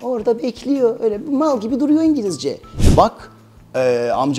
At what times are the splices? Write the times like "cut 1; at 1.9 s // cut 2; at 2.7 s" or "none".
cut 1; at 2.7 s